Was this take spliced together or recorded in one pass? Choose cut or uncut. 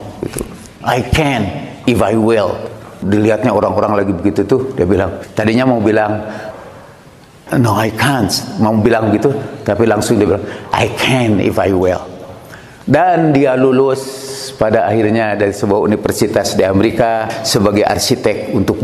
cut